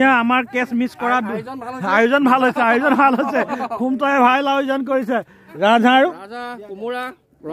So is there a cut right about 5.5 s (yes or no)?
yes